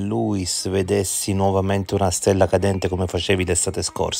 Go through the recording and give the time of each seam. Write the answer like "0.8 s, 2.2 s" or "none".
none